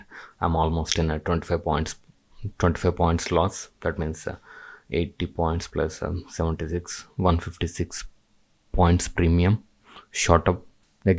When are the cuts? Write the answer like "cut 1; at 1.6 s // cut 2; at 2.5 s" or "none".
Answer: none